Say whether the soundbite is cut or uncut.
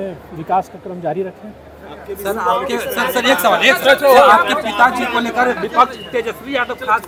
uncut